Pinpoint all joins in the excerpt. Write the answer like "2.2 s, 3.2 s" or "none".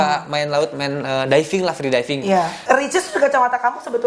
2.6 s